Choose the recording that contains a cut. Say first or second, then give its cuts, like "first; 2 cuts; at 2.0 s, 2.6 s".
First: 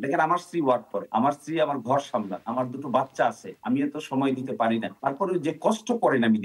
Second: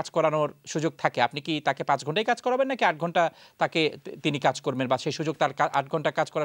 first; 4 cuts; at 1.0 s, 2.4 s, 3.5 s, 4.9 s